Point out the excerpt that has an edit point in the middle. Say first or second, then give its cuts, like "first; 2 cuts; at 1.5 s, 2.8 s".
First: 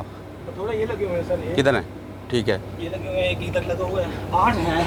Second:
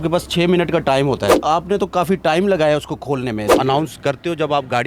second; 2 cuts; at 1.3 s, 3.5 s